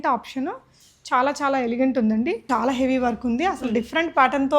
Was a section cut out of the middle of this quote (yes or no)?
yes